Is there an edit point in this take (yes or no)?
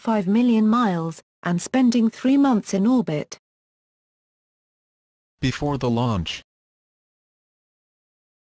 no